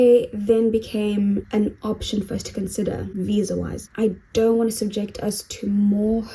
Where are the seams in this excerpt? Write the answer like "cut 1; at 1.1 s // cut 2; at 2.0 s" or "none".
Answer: cut 1; at 1.5 s // cut 2; at 3.8 s